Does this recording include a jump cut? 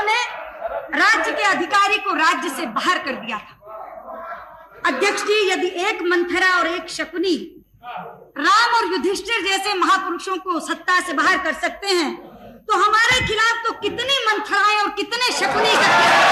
no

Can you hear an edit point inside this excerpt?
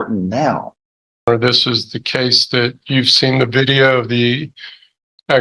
yes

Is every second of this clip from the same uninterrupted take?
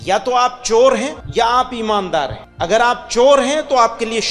no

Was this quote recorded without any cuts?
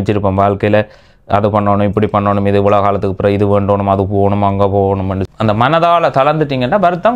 no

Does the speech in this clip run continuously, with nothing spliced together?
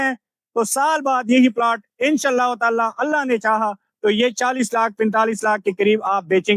yes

